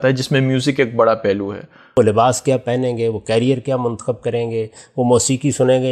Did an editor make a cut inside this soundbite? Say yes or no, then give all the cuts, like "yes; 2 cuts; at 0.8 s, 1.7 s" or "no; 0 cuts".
yes; 1 cut; at 2.0 s